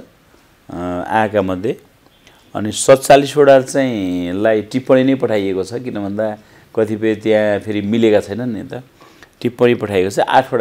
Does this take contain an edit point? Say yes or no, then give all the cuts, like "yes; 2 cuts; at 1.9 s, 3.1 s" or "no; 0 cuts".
no; 0 cuts